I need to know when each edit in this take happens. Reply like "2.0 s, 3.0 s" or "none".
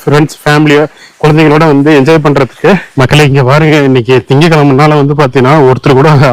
2.9 s